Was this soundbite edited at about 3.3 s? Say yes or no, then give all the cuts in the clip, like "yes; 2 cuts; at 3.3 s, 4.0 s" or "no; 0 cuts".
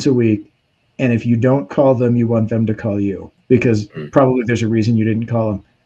yes; 1 cut; at 3.3 s